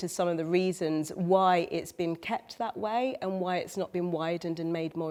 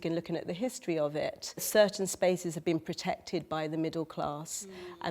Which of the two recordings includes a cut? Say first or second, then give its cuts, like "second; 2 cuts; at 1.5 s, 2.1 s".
second; 1 cut; at 1.6 s